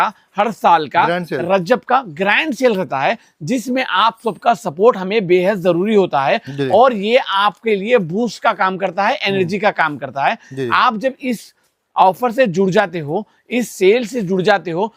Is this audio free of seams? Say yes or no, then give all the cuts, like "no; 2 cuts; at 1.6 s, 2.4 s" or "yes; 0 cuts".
yes; 0 cuts